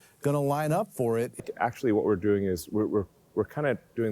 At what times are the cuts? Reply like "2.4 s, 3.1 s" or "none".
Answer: 1.3 s